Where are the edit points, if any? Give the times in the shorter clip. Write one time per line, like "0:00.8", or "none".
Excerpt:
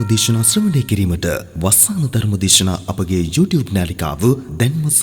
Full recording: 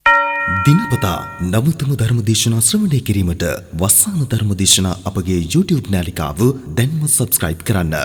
none